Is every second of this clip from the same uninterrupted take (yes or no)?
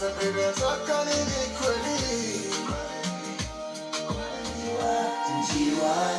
no